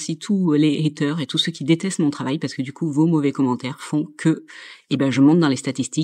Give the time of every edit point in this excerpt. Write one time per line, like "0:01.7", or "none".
none